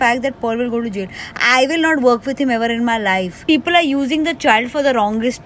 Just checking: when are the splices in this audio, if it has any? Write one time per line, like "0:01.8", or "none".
0:03.3